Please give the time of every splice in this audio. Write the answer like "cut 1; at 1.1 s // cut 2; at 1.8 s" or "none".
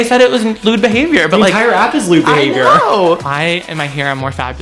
cut 1; at 3.2 s

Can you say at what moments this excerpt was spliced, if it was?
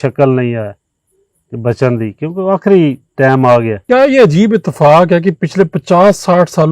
cut 1; at 3.8 s

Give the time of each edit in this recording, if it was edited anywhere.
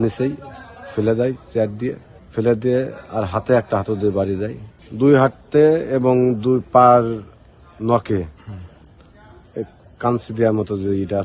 cut 1; at 4.8 s

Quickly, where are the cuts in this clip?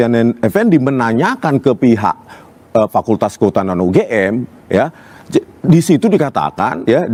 none

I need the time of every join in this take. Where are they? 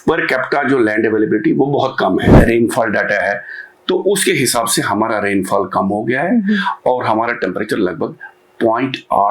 cut 1; at 2.3 s

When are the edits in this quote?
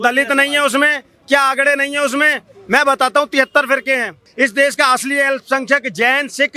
cut 1; at 4.3 s

